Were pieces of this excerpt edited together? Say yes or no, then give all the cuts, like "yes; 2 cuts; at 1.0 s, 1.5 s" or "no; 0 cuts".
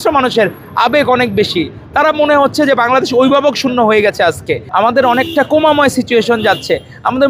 yes; 1 cut; at 4.6 s